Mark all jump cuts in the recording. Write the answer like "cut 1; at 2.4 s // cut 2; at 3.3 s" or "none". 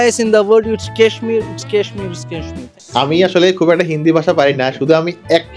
cut 1; at 2.6 s